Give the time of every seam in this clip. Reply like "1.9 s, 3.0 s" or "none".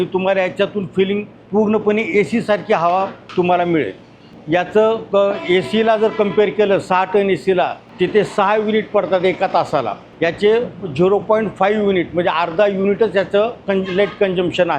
1.3 s, 3.2 s, 4.3 s, 7.8 s, 10.0 s